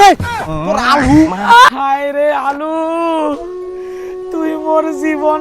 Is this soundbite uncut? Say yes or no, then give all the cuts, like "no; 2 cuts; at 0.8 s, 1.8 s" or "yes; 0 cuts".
no; 1 cut; at 1.7 s